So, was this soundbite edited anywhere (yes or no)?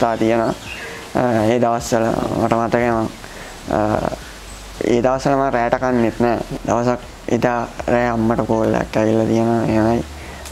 yes